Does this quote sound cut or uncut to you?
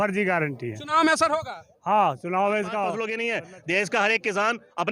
cut